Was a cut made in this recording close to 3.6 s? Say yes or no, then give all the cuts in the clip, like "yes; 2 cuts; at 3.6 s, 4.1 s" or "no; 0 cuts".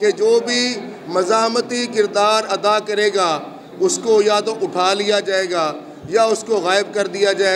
no; 0 cuts